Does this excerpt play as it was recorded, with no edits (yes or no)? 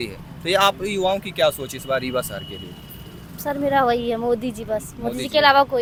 yes